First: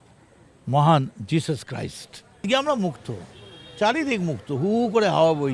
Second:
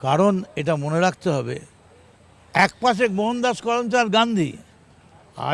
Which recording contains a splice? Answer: first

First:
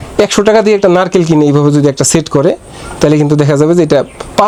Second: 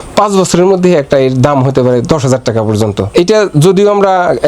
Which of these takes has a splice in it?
second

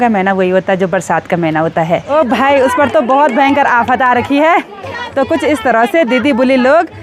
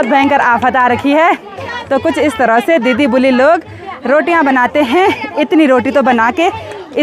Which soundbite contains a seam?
first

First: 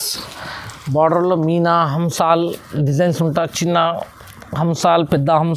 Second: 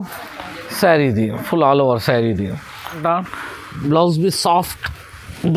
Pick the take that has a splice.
second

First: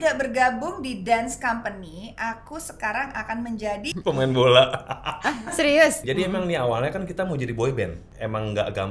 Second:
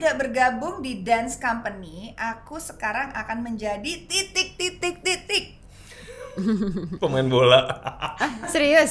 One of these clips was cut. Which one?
first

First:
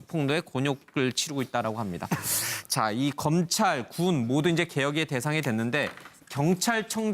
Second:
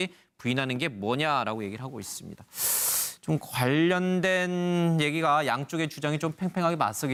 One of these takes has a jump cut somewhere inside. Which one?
first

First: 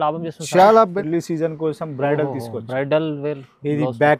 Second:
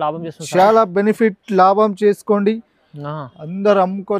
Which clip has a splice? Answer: first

